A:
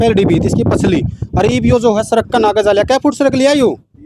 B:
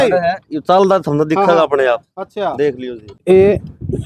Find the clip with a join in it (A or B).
B